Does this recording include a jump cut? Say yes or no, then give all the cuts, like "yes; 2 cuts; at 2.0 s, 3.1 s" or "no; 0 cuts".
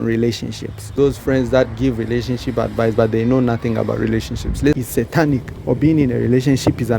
yes; 2 cuts; at 0.9 s, 4.5 s